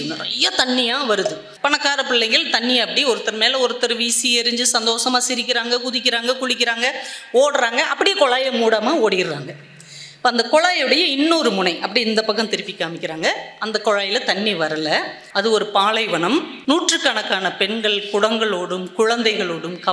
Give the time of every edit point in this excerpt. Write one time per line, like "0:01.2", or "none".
0:01.5
0:15.2
0:16.5